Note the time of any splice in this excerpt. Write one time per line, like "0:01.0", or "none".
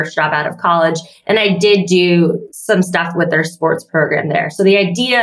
0:02.5